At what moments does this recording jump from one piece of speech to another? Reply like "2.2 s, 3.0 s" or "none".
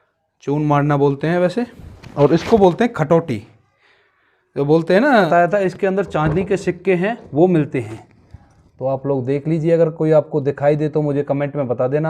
5.3 s